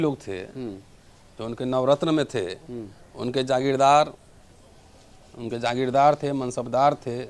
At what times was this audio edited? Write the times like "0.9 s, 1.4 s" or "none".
none